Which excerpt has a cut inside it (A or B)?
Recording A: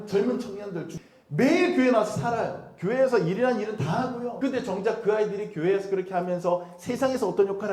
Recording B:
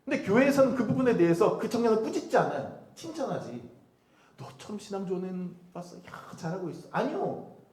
A